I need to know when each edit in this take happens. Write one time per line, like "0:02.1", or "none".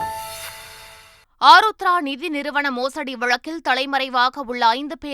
none